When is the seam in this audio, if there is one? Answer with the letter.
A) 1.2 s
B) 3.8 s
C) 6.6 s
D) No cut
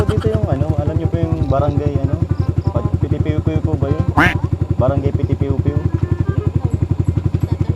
B